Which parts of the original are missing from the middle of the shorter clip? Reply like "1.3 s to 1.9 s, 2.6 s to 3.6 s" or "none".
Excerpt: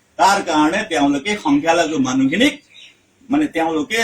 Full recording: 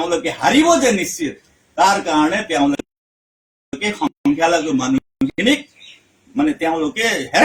3.0 s to 4.2 s, 5.0 s to 5.4 s